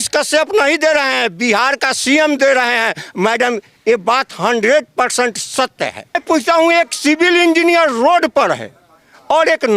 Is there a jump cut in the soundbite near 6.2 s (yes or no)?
yes